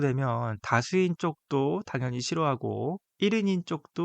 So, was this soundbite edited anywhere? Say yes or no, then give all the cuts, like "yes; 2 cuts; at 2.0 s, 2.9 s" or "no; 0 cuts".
yes; 1 cut; at 3.1 s